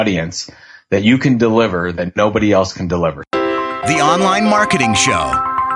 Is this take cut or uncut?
cut